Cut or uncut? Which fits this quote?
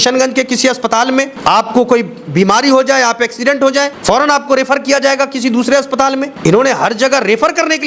cut